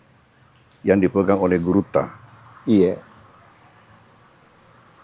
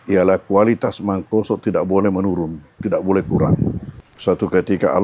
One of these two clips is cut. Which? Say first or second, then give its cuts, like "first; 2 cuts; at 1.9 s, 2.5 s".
second; 1 cut; at 3.9 s